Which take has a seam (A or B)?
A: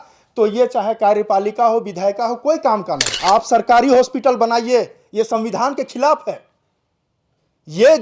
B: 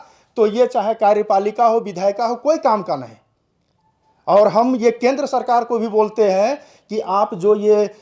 A